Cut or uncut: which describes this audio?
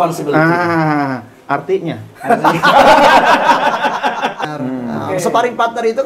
cut